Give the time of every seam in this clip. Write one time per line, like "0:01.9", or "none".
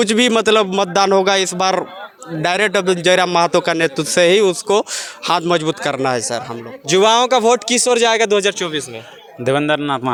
none